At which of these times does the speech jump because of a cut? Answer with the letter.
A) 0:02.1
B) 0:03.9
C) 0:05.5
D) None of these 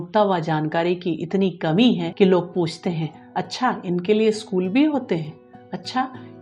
A